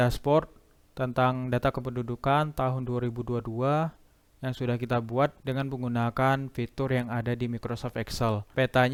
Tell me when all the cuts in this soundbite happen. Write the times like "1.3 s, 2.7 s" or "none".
none